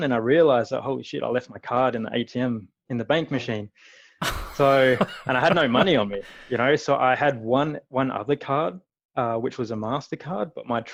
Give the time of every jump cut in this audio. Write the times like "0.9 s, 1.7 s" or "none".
none